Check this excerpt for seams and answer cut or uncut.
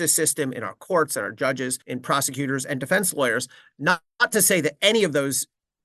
cut